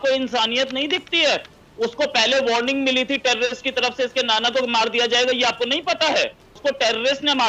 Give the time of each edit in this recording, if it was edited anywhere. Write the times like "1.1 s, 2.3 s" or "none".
6.4 s

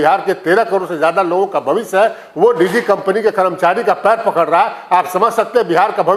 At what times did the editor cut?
none

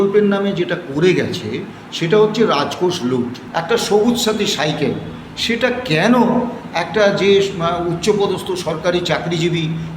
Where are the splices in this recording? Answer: 3.4 s

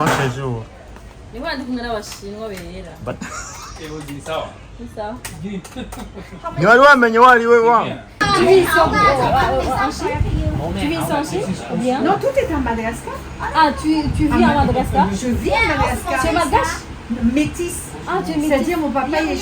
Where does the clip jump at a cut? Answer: 8.2 s

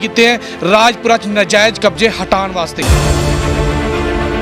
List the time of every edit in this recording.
2.8 s

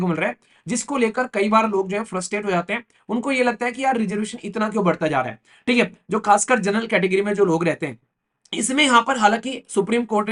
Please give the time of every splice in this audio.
none

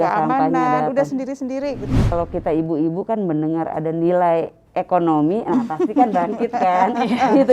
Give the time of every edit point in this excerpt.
2.1 s

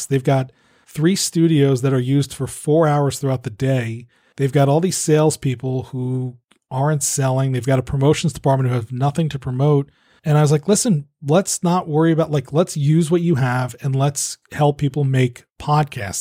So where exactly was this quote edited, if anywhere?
none

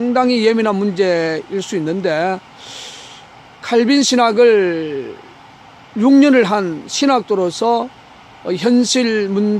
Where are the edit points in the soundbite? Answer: 7.9 s

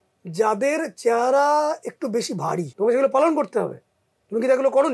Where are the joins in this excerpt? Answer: 2.7 s

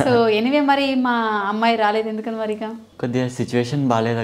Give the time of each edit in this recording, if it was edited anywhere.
none

